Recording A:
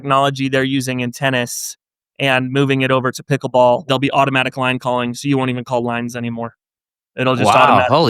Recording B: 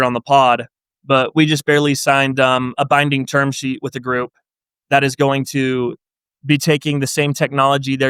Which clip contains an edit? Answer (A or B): A